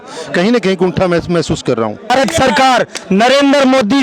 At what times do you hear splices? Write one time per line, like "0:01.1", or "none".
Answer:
0:02.1